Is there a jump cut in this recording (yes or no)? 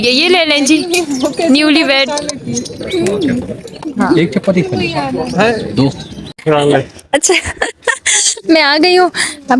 yes